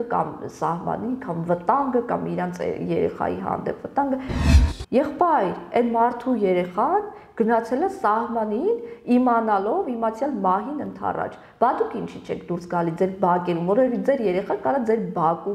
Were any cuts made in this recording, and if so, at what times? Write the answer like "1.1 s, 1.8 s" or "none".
4.3 s